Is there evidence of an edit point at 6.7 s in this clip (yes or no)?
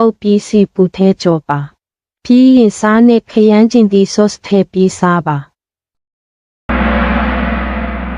yes